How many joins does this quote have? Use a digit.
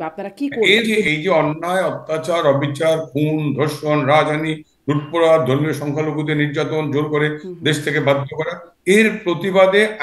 1